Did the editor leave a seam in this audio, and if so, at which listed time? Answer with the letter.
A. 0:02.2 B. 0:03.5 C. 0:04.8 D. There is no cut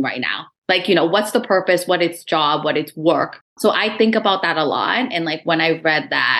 B